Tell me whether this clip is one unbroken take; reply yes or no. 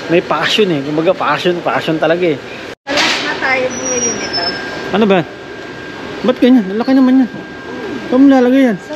no